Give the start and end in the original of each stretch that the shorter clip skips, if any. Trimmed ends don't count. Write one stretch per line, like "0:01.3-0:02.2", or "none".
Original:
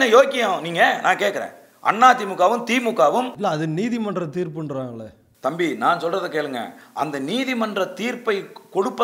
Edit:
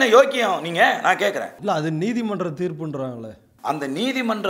0:01.6-0:03.3
0:05.2-0:06.8